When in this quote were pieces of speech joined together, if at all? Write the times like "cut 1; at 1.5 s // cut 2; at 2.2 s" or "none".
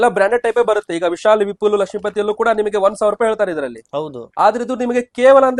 none